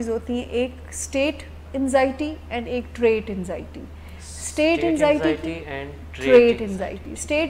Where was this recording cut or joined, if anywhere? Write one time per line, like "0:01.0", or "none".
none